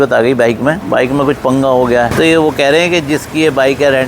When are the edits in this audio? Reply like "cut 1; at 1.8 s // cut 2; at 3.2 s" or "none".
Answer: cut 1; at 2.1 s